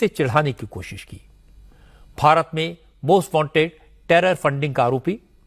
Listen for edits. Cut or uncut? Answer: uncut